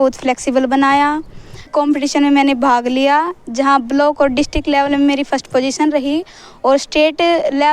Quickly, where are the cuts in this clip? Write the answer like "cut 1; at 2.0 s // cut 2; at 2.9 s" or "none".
cut 1; at 1.7 s